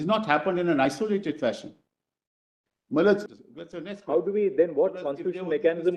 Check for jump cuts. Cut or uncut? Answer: cut